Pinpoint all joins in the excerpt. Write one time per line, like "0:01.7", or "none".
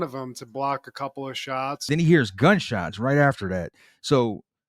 0:01.9